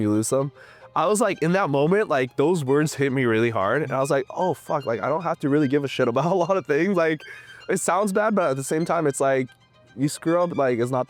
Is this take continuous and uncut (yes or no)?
yes